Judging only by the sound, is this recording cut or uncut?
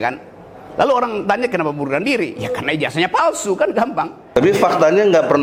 uncut